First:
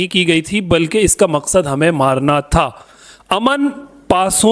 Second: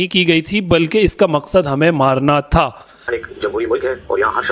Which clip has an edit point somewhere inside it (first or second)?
second